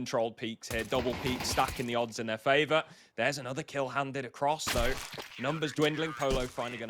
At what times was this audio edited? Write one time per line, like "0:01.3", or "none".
0:04.1